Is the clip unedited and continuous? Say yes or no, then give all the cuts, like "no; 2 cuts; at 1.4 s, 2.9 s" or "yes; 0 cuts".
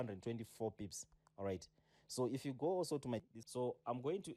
no; 1 cut; at 3.2 s